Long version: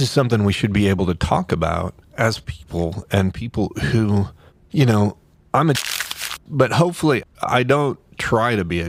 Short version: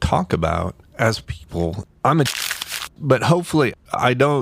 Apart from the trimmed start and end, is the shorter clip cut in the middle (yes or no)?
yes